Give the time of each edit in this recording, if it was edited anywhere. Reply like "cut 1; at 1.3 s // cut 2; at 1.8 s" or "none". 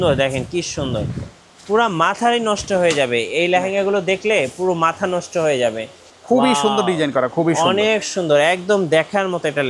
none